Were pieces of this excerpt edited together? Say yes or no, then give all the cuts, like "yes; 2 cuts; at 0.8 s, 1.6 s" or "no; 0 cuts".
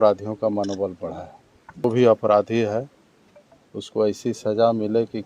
yes; 1 cut; at 1.8 s